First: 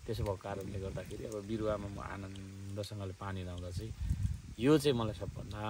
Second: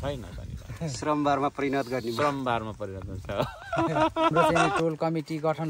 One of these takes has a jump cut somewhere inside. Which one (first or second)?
second